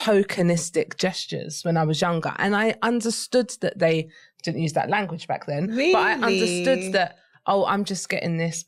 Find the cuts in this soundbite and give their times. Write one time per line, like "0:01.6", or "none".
none